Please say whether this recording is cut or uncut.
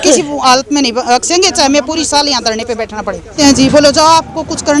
cut